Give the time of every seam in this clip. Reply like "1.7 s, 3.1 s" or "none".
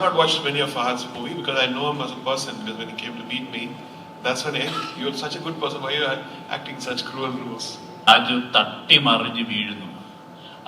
8.1 s